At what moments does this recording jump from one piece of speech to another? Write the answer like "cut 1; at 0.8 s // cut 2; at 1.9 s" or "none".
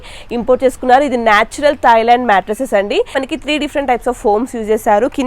cut 1; at 3.2 s